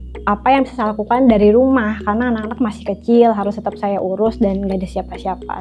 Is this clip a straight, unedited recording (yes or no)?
yes